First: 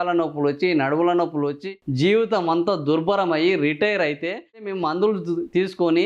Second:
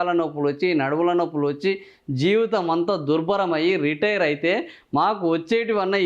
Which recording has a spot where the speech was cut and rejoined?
first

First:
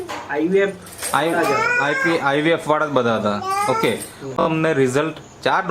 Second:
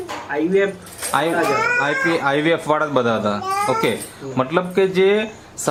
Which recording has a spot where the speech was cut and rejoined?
first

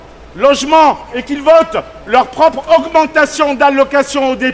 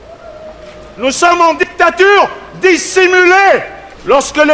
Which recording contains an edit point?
second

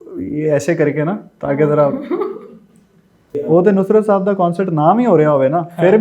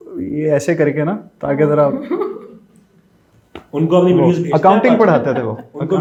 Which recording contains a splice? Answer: first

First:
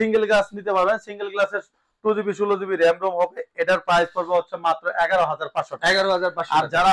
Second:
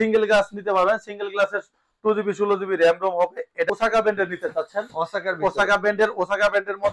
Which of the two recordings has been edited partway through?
second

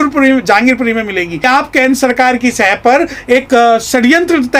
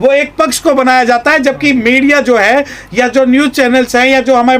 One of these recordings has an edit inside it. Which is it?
first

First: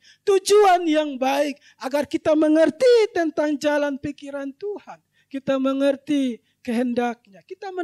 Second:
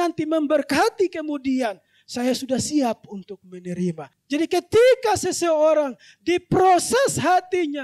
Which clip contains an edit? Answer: second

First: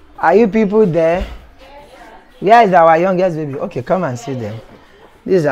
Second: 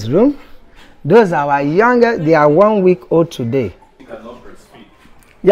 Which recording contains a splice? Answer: second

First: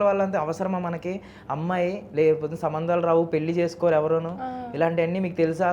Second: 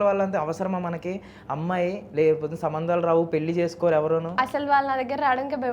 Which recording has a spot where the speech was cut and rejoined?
second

